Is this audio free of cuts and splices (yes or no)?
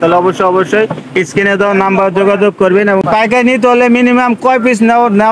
no